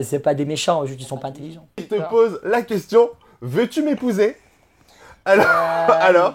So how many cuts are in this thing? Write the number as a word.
one